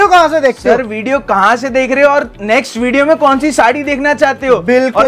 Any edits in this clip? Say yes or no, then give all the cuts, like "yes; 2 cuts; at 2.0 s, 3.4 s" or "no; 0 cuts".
no; 0 cuts